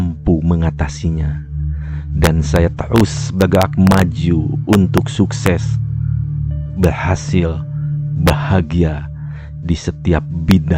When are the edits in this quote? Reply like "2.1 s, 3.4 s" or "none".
none